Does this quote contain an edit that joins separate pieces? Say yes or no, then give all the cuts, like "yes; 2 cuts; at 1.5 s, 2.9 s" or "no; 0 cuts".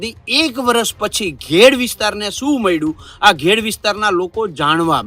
no; 0 cuts